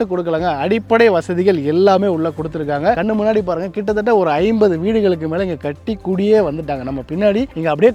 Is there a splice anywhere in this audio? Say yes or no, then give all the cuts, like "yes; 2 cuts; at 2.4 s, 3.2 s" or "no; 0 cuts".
no; 0 cuts